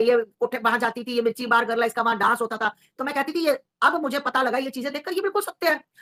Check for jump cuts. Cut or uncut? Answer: uncut